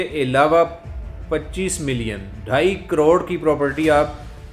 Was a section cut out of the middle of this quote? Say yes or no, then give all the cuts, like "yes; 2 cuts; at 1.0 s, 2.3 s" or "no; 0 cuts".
no; 0 cuts